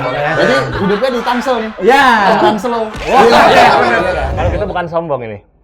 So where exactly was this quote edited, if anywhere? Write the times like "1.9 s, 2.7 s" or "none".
4.3 s